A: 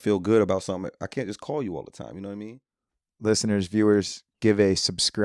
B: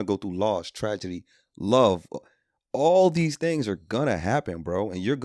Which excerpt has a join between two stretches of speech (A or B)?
A